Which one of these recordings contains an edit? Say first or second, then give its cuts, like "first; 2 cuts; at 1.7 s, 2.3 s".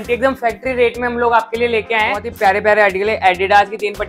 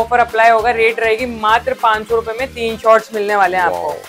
first; 1 cut; at 2.3 s